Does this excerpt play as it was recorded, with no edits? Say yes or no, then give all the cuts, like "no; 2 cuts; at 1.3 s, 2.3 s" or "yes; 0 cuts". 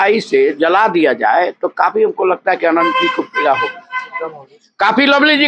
yes; 0 cuts